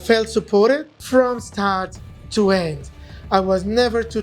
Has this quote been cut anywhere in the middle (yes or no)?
yes